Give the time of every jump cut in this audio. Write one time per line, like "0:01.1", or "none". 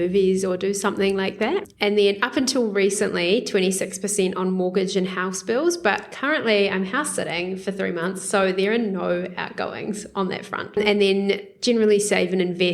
0:01.7
0:10.8